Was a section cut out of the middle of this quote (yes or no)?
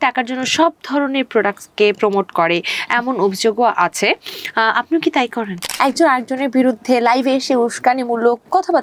yes